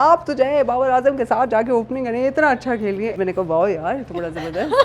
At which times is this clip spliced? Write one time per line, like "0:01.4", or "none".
0:03.1

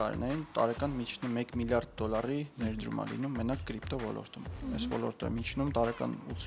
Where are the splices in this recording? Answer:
0:04.5

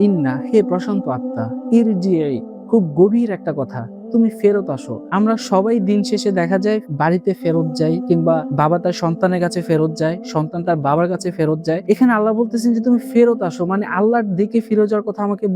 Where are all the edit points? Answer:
none

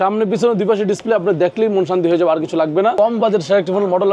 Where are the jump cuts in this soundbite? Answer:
0:02.9

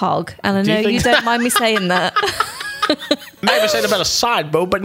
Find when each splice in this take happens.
0:03.4

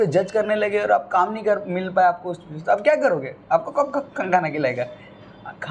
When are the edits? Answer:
none

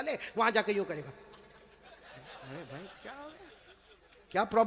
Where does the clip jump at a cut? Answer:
none

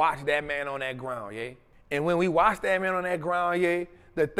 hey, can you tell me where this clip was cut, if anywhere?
0:01.7

